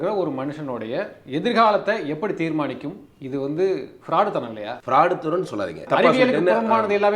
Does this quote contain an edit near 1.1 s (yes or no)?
no